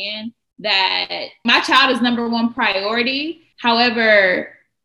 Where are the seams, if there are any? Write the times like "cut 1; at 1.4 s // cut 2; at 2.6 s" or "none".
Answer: cut 1; at 1.4 s